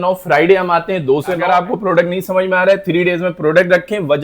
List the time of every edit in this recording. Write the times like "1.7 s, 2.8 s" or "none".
1.4 s